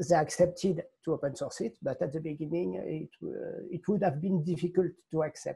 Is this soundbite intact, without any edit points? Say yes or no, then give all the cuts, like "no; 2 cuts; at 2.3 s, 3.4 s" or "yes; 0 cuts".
yes; 0 cuts